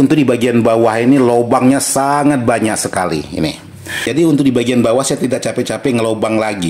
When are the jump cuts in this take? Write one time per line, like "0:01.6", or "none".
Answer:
0:04.1